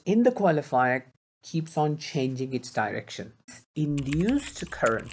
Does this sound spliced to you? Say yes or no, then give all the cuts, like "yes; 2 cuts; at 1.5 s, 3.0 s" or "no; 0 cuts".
yes; 1 cut; at 3.6 s